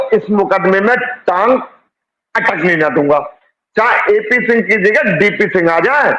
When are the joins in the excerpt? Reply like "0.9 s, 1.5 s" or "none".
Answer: none